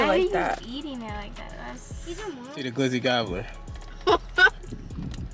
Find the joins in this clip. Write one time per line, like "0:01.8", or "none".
0:02.7